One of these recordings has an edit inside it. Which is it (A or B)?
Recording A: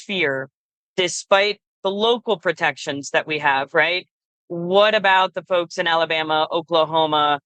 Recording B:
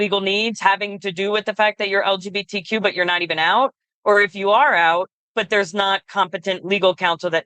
B